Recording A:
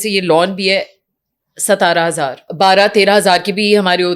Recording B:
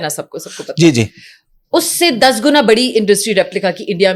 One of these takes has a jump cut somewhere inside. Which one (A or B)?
A